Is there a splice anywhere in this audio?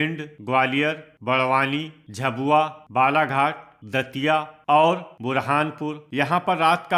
yes; 5 cuts; at 1.1 s, 2.4 s, 3.7 s, 5.1 s, 6.0 s

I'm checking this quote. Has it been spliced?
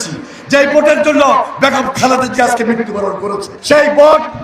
yes; 1 cut; at 3.5 s

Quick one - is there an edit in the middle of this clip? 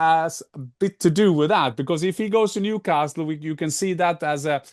no; 0 cuts

